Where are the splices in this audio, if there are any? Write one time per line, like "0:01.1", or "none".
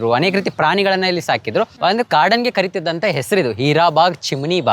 0:01.7